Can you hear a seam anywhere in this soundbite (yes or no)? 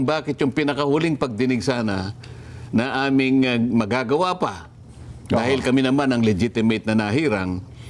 no